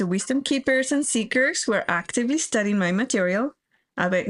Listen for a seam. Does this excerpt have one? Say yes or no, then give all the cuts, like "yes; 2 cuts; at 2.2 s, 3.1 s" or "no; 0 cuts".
no; 0 cuts